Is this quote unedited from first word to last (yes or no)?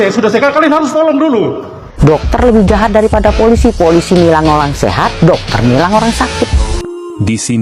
no